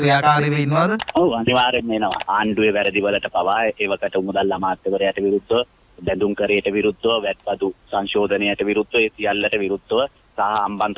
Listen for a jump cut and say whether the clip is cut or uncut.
cut